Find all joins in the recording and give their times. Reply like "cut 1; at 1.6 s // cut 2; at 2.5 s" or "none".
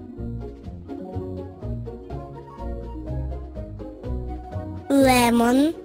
cut 1; at 3.5 s